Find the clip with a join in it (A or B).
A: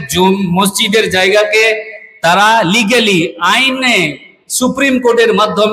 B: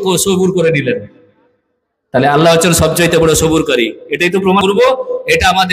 B